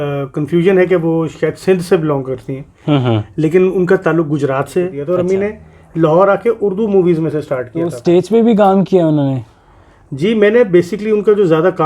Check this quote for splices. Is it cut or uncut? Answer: cut